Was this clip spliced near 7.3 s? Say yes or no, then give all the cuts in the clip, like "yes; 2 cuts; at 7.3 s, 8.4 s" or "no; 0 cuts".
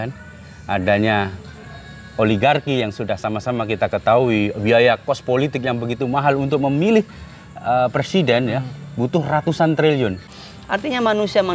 no; 1 cut; at 10.2 s